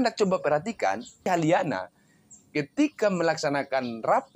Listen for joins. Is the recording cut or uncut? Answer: cut